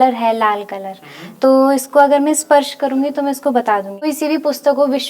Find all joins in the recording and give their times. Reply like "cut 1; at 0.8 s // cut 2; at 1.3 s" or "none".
cut 1; at 4.1 s

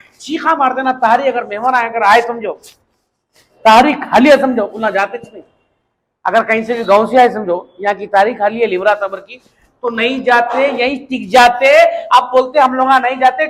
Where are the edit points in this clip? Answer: none

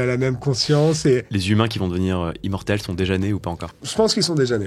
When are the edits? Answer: cut 1; at 1.3 s // cut 2; at 3.8 s

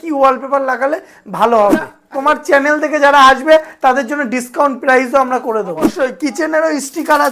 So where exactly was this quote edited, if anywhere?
cut 1; at 2.0 s // cut 2; at 6.0 s

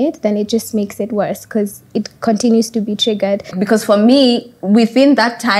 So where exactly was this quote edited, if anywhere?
cut 1; at 3.5 s

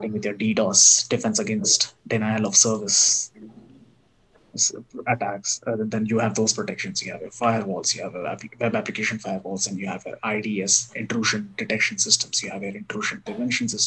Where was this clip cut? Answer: none

